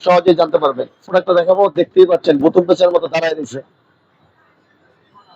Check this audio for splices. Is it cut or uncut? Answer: cut